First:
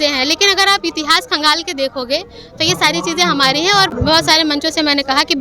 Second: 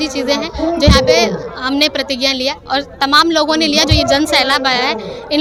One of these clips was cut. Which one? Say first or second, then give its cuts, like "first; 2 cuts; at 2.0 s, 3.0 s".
first; 1 cut; at 3.9 s